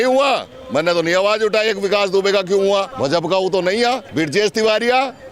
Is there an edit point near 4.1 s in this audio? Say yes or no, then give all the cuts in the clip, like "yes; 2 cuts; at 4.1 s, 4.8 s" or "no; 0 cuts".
yes; 2 cuts; at 2.9 s, 4.1 s